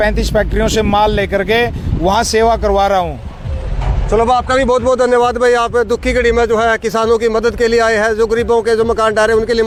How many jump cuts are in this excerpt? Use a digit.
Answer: 0